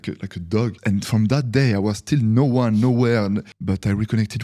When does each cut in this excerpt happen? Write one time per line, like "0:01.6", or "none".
0:00.8
0:03.5